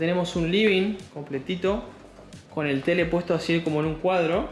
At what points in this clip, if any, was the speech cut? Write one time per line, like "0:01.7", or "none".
none

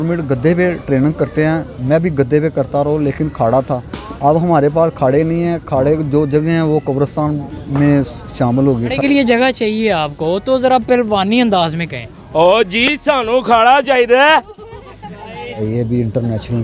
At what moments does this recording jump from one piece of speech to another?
0:09.0
0:15.6

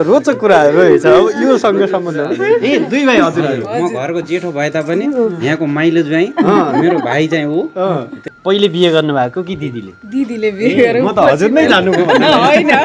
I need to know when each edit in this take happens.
0:08.3

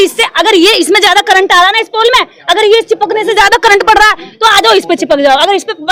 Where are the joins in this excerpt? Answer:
none

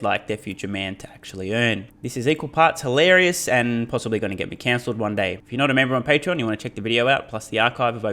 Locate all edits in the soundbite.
0:02.0
0:05.4

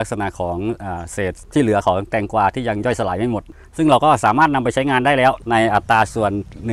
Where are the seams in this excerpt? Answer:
0:01.4
0:05.4

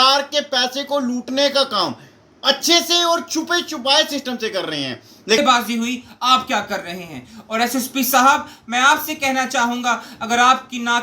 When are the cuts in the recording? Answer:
0:05.4

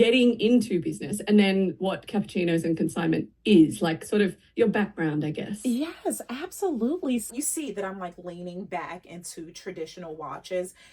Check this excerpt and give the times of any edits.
0:07.3

